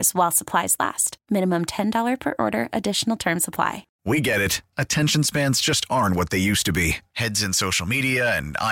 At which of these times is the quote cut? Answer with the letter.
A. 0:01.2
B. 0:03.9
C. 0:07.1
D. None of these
B